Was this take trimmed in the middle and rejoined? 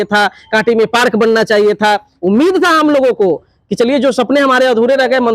yes; 1 cut; at 2.1 s

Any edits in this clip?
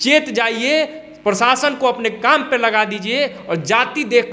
no; 0 cuts

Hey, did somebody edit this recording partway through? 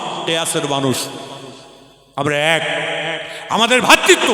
no; 0 cuts

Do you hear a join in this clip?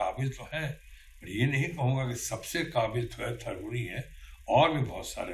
no; 0 cuts

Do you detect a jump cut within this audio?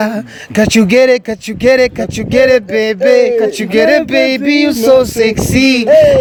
no; 0 cuts

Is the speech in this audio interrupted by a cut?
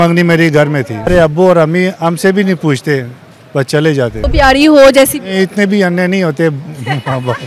yes; 2 cuts; at 1.1 s, 4.3 s

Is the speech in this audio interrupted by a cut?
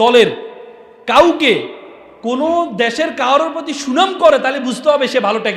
no; 0 cuts

